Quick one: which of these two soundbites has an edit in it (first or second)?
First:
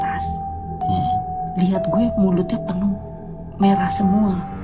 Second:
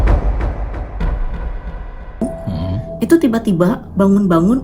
second